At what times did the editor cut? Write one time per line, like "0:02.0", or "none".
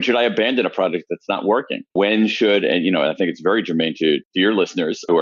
none